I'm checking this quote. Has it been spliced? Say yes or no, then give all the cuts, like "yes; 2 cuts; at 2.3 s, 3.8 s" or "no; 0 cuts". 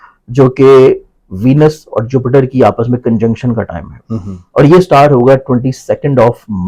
no; 0 cuts